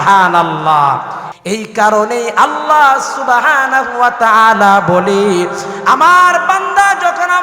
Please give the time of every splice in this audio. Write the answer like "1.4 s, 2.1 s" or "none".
1.2 s